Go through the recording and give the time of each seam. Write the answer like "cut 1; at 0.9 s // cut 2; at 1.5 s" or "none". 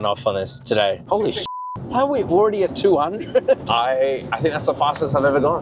cut 1; at 1.0 s // cut 2; at 3.6 s

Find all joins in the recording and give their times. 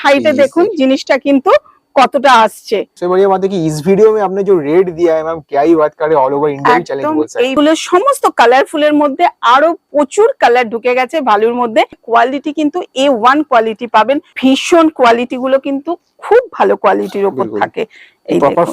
cut 1; at 2.9 s // cut 2; at 7.5 s // cut 3; at 12.0 s // cut 4; at 14.3 s

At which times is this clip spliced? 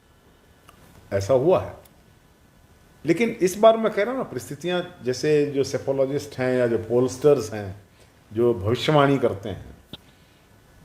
none

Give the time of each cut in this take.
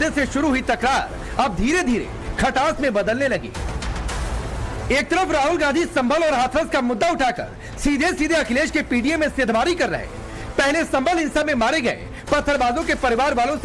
cut 1; at 10.8 s

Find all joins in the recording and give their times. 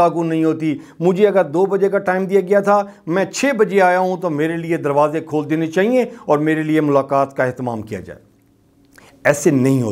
none

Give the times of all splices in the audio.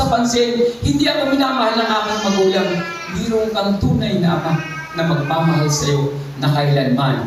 none

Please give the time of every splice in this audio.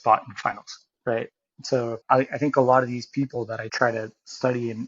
cut 1; at 2.0 s // cut 2; at 3.7 s

